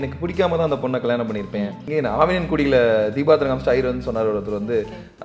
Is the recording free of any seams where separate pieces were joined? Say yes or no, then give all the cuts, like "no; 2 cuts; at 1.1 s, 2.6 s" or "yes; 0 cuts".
no; 1 cut; at 1.8 s